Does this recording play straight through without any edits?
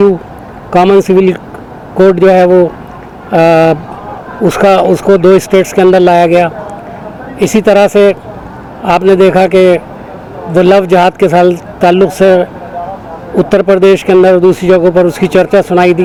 yes; 0 cuts

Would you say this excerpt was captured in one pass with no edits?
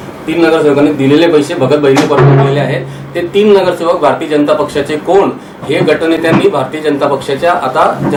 yes; 0 cuts

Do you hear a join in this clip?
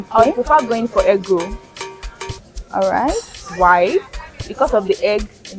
no; 0 cuts

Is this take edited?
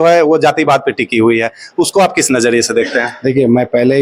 no; 0 cuts

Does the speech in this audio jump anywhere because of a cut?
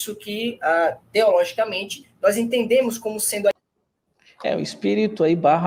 no; 0 cuts

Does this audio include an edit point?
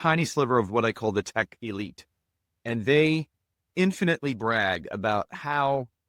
no; 0 cuts

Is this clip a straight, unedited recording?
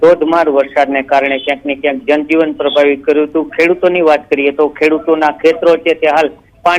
yes; 0 cuts

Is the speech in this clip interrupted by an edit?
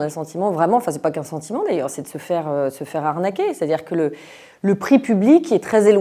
no; 0 cuts

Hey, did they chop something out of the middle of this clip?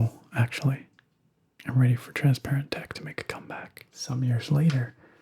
yes; 1 cut; at 4.0 s

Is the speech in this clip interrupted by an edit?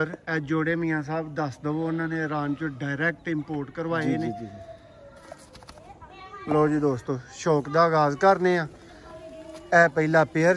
no; 0 cuts

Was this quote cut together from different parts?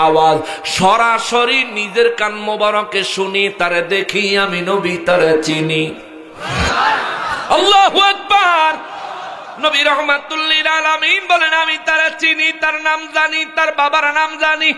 no; 0 cuts

